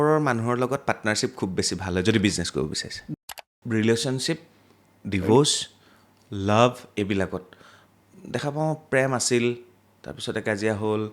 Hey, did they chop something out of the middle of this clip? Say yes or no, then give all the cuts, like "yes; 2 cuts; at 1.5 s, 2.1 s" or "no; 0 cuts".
yes; 1 cut; at 3.3 s